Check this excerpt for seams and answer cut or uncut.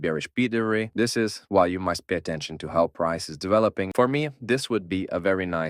cut